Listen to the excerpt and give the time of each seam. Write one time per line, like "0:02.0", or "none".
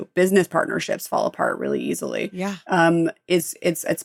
none